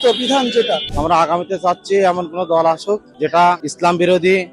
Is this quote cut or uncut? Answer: cut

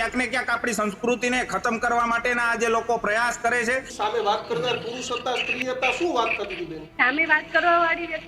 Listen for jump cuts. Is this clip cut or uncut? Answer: cut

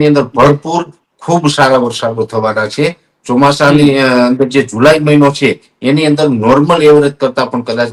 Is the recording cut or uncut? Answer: uncut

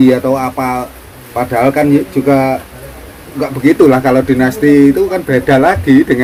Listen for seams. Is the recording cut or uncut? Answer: uncut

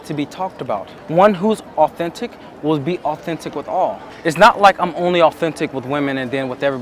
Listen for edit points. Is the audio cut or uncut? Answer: cut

